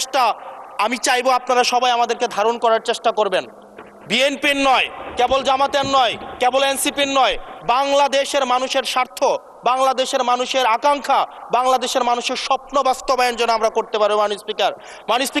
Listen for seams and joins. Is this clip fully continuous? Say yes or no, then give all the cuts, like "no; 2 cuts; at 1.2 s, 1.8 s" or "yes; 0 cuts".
yes; 0 cuts